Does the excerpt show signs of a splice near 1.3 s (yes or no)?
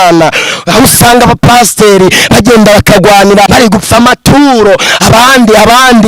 no